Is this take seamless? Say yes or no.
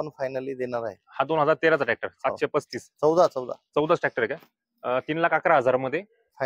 yes